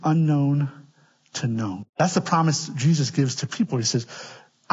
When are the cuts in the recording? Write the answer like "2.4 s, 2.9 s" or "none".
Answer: 1.8 s